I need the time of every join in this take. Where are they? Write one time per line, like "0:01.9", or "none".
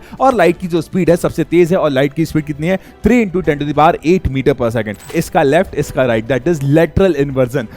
0:05.1